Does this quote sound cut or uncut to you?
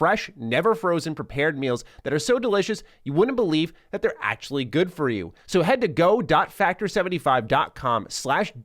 cut